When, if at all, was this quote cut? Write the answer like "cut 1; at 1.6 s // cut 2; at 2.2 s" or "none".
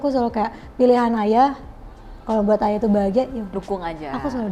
none